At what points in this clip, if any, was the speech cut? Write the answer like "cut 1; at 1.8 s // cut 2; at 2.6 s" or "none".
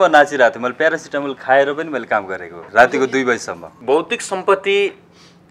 cut 1; at 2.6 s // cut 2; at 3.7 s